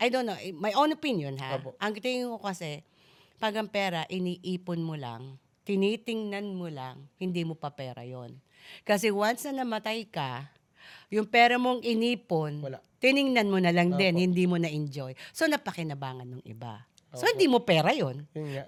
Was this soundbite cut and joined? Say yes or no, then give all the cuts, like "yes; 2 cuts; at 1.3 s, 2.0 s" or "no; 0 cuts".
no; 0 cuts